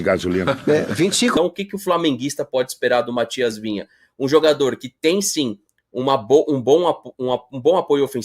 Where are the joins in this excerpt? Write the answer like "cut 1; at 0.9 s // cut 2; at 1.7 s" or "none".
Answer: cut 1; at 1.4 s